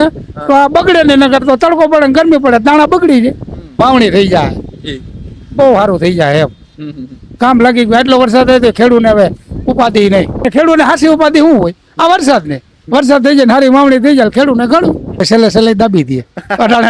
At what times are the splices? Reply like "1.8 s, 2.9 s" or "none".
3.6 s, 10.5 s, 15.2 s